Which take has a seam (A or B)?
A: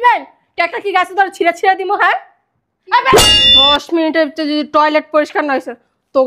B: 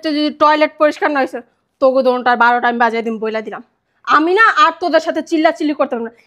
A